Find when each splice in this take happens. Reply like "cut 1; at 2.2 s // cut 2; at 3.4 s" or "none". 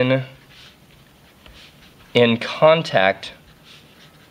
cut 1; at 1.1 s